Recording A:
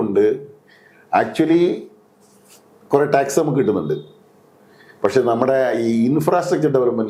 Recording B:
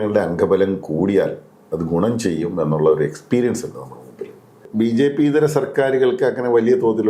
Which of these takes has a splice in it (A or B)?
B